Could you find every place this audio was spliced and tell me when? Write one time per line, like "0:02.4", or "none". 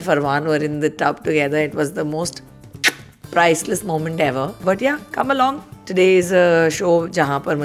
none